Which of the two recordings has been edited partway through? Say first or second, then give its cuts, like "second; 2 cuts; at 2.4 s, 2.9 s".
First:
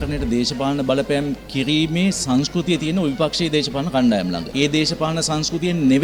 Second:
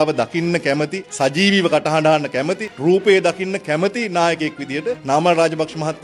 second; 3 cuts; at 1.0 s, 2.6 s, 5.0 s